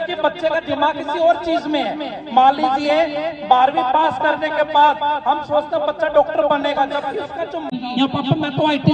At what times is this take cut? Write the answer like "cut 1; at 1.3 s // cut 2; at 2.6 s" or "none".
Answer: none